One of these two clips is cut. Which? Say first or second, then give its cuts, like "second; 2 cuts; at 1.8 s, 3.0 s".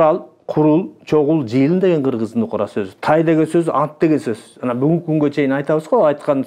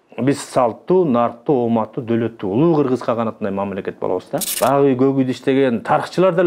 second; 1 cut; at 4.6 s